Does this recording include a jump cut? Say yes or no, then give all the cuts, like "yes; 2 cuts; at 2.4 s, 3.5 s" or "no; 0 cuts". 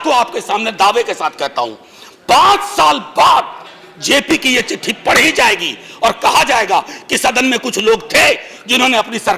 no; 0 cuts